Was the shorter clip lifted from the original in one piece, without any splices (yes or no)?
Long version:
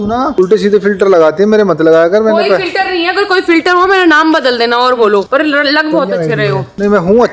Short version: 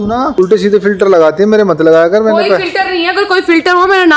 yes